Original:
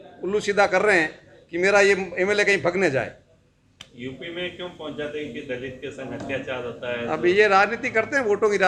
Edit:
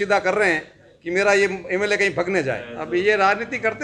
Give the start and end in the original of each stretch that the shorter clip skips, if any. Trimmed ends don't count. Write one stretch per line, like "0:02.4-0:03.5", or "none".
0:03.2-0:07.0

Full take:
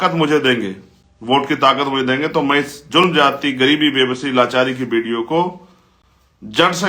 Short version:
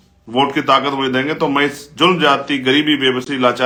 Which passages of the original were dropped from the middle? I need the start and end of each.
none

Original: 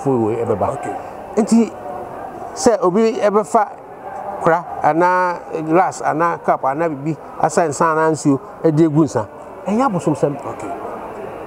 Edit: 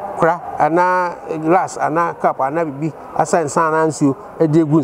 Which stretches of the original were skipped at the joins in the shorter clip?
none

